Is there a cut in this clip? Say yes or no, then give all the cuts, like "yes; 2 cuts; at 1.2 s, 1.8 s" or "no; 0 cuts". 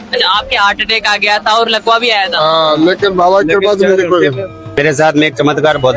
yes; 1 cut; at 4.8 s